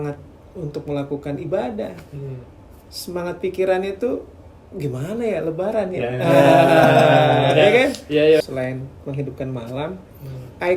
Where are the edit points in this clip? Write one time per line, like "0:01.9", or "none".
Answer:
0:08.4